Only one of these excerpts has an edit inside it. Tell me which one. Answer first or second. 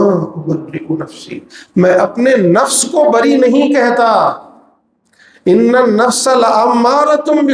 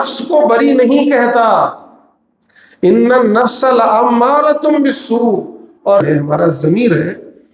second